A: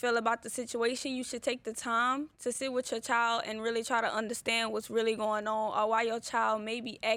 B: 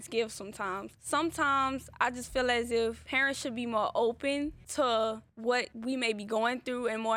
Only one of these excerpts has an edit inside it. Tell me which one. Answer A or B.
B